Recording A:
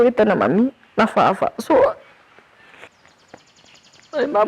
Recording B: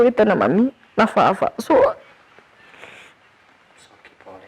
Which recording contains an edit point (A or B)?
A